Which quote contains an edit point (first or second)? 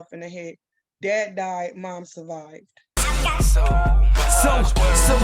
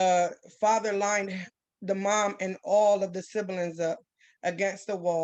first